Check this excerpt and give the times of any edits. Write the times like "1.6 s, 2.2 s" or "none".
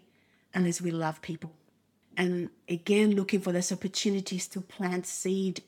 1.6 s